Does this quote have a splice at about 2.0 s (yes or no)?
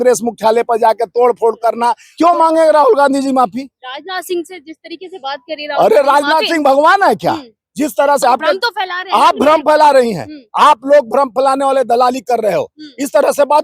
yes